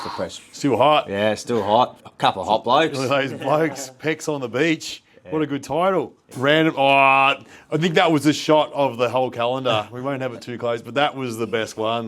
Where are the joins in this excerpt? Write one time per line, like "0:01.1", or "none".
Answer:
0:02.0
0:06.2